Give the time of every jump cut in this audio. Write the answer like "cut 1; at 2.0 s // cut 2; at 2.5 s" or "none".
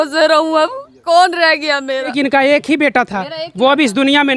cut 1; at 2.1 s